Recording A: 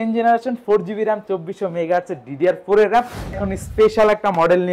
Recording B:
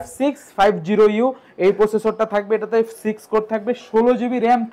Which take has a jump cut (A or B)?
A